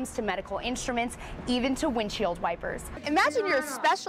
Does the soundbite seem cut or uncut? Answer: cut